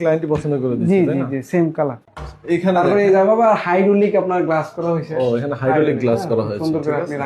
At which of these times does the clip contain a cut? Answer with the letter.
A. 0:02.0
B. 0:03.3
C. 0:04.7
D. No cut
A